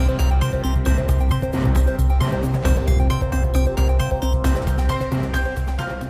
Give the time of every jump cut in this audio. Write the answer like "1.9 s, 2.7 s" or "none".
none